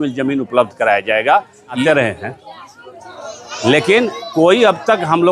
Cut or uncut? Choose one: cut